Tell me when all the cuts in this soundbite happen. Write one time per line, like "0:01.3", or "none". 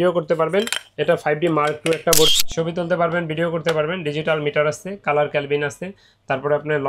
0:02.3

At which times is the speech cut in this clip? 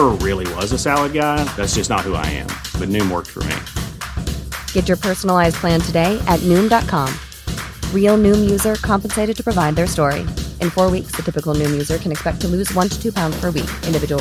none

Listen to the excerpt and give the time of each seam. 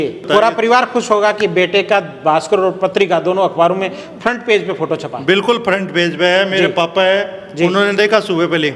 none

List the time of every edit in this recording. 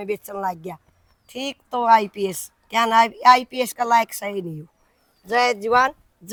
none

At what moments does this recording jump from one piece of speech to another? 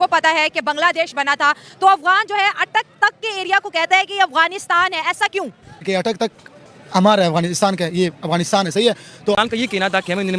0:09.3

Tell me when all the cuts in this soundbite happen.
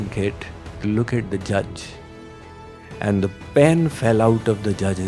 none

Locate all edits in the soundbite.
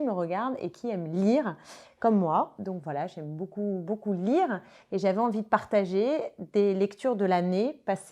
none

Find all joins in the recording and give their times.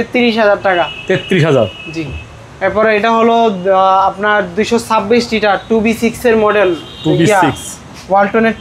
none

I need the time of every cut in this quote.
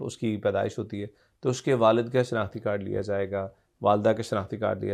none

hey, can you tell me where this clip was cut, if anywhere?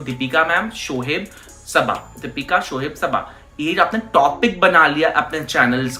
none

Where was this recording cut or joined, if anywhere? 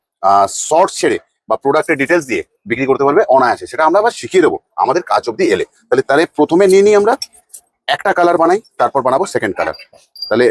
none

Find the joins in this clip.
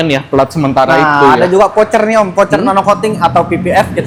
none

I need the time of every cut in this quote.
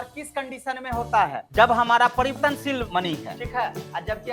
0:03.1

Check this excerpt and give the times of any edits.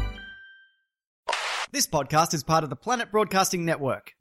0:01.2

